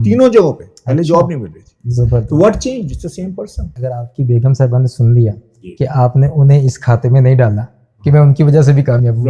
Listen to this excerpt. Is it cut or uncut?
cut